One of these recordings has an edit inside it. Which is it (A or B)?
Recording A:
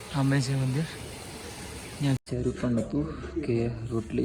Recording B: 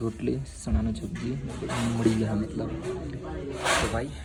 A